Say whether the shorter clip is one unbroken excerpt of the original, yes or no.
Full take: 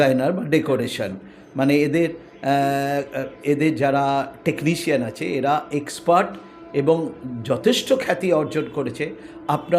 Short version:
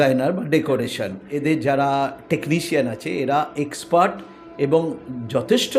no